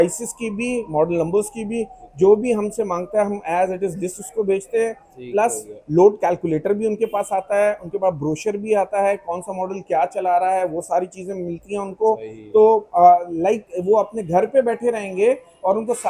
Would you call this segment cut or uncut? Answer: uncut